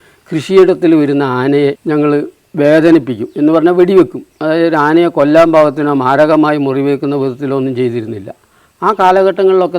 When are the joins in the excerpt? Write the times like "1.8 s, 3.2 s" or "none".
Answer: 1.8 s